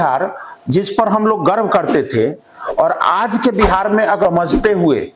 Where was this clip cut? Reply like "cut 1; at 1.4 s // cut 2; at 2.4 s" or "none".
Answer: cut 1; at 4.2 s